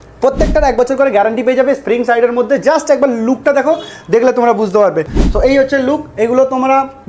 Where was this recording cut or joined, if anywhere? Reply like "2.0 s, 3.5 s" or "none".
5.1 s